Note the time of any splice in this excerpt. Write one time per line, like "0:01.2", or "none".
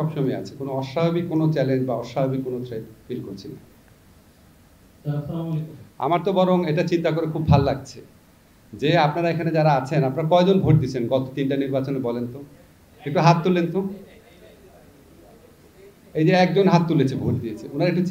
none